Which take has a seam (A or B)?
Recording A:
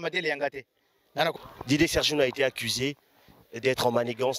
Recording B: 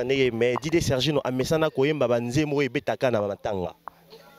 A